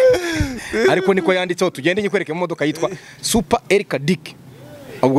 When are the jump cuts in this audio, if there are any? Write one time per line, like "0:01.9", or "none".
none